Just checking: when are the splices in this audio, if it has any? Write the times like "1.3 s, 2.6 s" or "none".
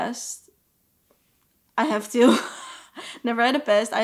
none

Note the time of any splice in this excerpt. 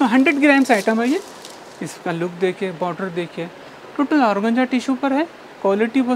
none

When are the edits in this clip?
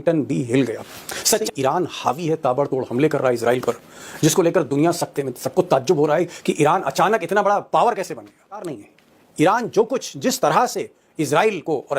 1.4 s, 8.7 s

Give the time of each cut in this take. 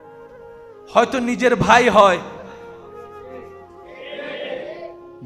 0.9 s

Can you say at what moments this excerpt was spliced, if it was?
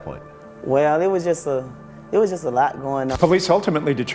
3.1 s

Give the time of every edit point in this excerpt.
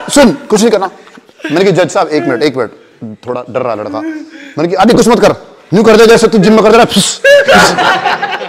none

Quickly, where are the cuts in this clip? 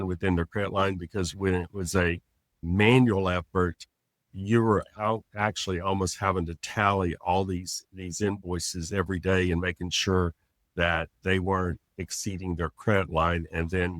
none

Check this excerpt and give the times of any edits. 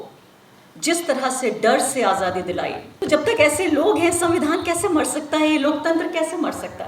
2.9 s

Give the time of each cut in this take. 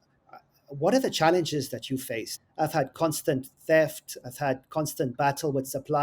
2.3 s

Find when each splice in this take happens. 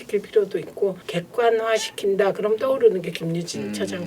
1.1 s

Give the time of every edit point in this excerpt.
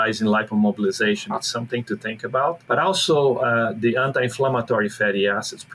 2.6 s

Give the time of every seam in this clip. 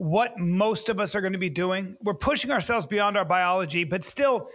none

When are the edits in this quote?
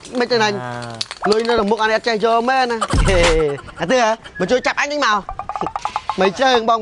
none

